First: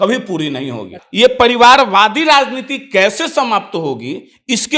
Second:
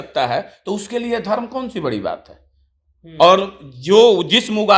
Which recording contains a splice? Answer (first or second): first